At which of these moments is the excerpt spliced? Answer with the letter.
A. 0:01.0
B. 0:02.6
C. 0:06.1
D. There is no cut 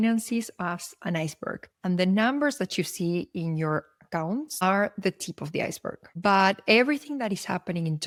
D